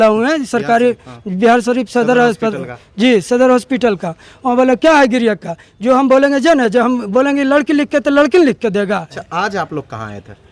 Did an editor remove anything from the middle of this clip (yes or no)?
yes